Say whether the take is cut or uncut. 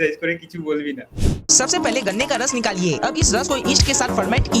cut